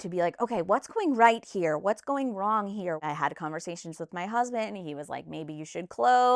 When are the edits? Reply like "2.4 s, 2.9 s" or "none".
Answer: 3.0 s

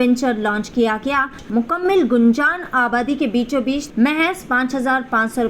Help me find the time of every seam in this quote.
1.4 s, 3.8 s

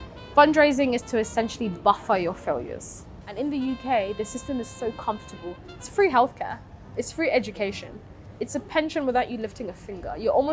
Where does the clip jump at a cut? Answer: 3.2 s

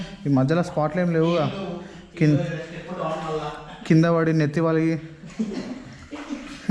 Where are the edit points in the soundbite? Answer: none

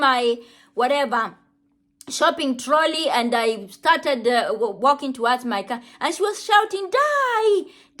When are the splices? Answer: none

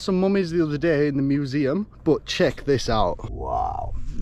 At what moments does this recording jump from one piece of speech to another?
1.9 s, 3.3 s

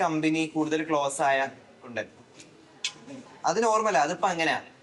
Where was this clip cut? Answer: none

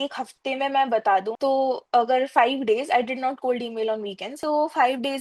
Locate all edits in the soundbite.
1.3 s, 4.4 s

